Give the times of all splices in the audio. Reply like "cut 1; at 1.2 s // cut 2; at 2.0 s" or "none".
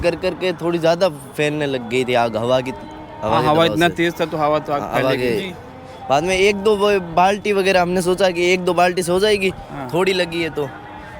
none

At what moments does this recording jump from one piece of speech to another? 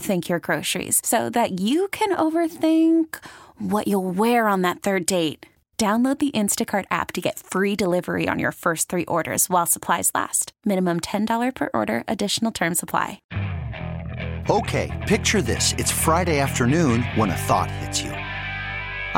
cut 1; at 13.2 s

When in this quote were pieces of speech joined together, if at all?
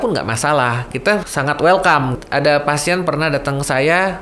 cut 1; at 1.0 s // cut 2; at 2.2 s

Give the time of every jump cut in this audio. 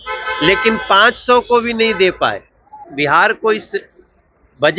cut 1; at 2.8 s

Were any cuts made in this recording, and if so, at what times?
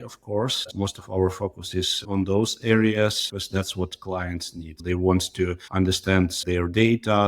cut 1; at 0.7 s // cut 2; at 4.8 s

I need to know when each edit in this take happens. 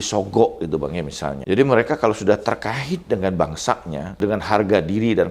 cut 1; at 1.4 s // cut 2; at 4.2 s

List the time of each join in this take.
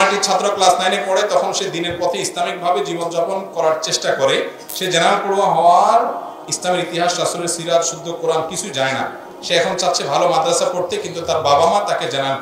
none

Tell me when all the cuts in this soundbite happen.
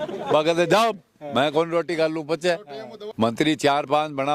cut 1; at 3.4 s

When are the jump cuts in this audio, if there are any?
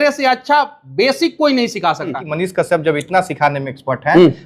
cut 1; at 2.3 s

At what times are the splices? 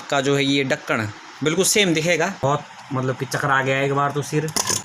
cut 1; at 2.4 s

